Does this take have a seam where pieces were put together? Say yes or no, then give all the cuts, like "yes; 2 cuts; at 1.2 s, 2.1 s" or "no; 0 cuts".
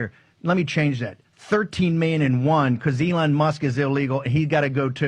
no; 0 cuts